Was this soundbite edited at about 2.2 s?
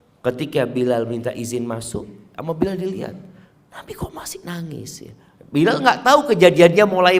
yes; 1 cut; at 2.2 s

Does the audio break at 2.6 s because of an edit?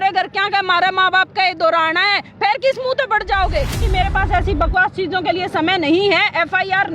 no; 1 cut; at 3.8 s

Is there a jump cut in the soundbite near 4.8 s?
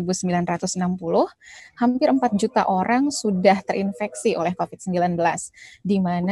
no; 1 cut; at 1.6 s

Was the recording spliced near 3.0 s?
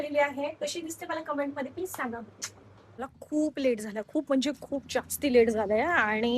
yes; 1 cut; at 3.0 s

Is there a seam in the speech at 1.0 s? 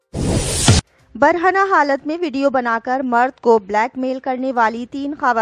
yes; 1 cut; at 1.0 s

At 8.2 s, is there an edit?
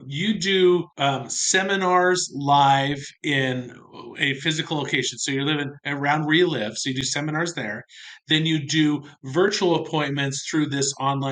no; 2 cuts; at 0.9 s, 3.1 s

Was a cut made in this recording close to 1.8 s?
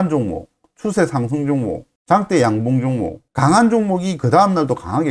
no; 1 cut; at 3.2 s

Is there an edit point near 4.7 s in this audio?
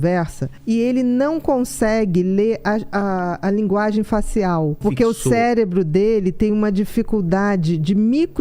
yes; 1 cut; at 4.7 s

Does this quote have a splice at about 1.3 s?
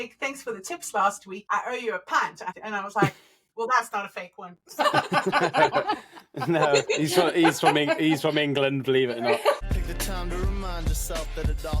yes; 3 cuts; at 1.3 s, 2.5 s, 9.6 s

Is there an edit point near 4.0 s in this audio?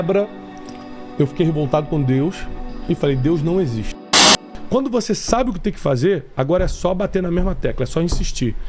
yes; 1 cut; at 4.0 s

